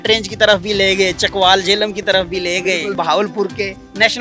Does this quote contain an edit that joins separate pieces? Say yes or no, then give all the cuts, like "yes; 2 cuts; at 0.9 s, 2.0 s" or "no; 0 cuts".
yes; 1 cut; at 2.9 s